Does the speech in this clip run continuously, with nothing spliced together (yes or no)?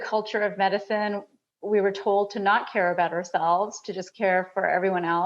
yes